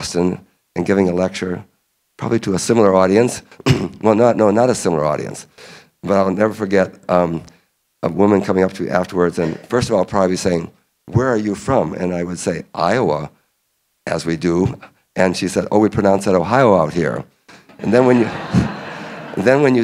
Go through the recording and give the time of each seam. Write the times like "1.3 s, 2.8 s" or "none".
none